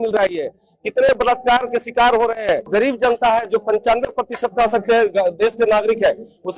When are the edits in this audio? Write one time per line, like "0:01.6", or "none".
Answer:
0:02.7